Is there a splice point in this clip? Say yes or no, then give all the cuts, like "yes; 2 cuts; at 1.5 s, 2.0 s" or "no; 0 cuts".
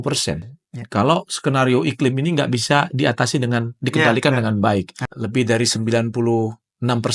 yes; 1 cut; at 5.0 s